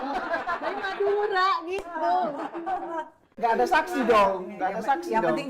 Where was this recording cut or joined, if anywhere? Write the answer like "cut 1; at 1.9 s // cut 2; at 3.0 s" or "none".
cut 1; at 3.2 s

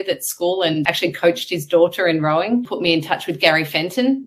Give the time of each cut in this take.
cut 1; at 0.8 s // cut 2; at 2.7 s

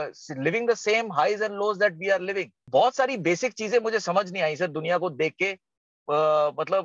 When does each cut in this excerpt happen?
cut 1; at 2.5 s

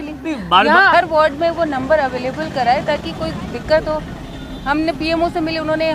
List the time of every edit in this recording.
cut 1; at 0.9 s

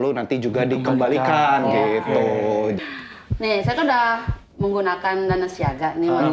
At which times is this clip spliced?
cut 1; at 2.8 s

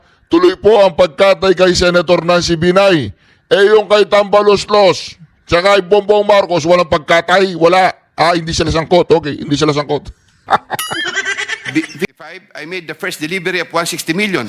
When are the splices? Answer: cut 1; at 12.0 s

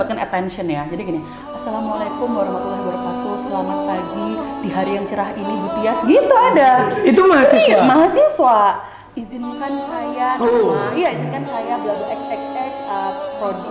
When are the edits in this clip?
none

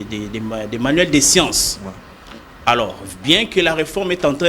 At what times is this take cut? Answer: none

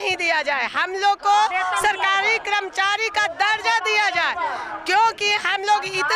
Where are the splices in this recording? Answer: none

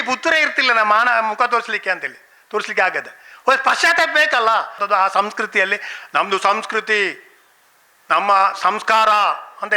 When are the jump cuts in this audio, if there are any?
cut 1; at 4.8 s

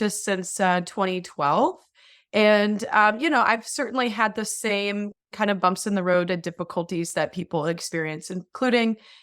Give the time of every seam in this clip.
none

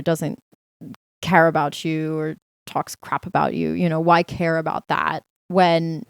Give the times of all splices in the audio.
none

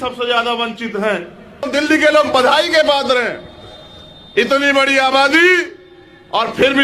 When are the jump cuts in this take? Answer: cut 1; at 1.7 s

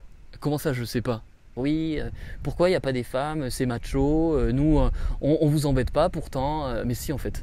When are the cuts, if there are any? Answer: cut 1; at 1.4 s

